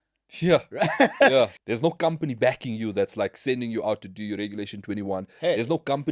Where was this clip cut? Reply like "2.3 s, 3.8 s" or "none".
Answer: 1.6 s